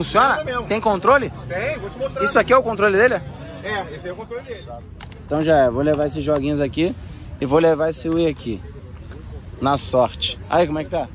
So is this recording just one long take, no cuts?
no; 1 cut; at 4.6 s

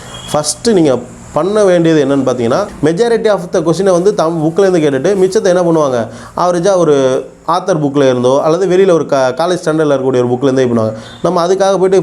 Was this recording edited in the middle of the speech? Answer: yes; 1 cut; at 2.7 s

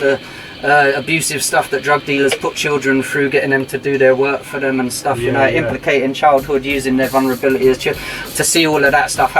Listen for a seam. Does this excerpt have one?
no; 0 cuts

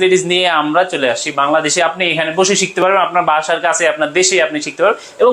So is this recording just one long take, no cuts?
yes; 0 cuts

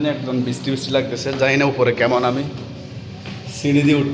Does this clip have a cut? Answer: no; 0 cuts

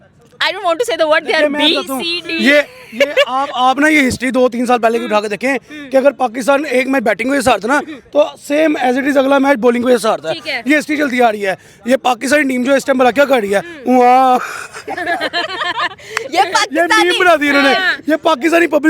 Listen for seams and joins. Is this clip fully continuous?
yes; 0 cuts

